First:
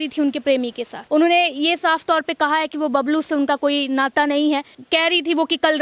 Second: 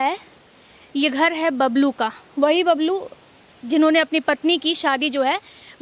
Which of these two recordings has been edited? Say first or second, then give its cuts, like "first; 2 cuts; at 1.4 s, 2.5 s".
first; 2 cuts; at 0.9 s, 4.8 s